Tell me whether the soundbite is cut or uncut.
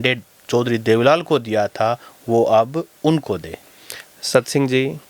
uncut